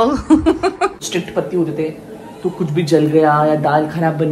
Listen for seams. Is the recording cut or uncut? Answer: cut